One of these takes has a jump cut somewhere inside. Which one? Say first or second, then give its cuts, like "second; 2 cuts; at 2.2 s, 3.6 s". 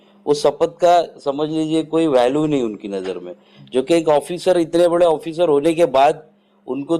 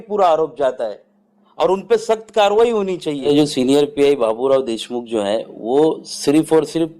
second; 1 cut; at 3.3 s